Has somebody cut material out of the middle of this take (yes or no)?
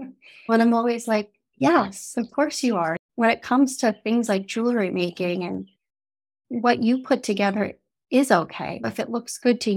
yes